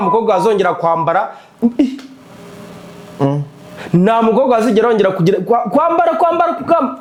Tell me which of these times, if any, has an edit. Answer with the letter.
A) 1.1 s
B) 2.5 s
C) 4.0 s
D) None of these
D